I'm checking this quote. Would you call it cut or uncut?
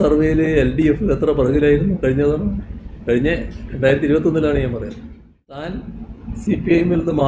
cut